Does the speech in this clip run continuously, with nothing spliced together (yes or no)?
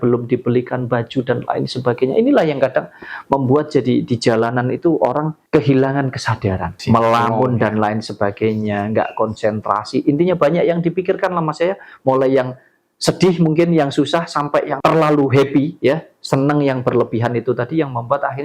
no